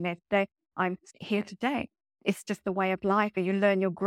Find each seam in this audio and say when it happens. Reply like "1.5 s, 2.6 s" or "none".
2.1 s, 3.4 s